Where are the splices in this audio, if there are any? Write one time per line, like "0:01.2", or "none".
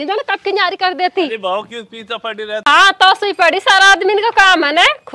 0:02.6